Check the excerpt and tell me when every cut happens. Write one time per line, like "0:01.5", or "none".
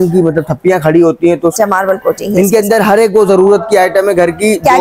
0:01.6